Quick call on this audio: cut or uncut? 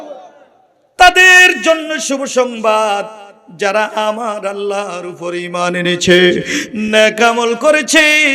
uncut